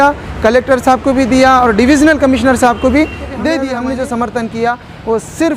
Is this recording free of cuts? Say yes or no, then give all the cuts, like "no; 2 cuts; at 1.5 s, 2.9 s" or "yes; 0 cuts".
no; 1 cut; at 3.6 s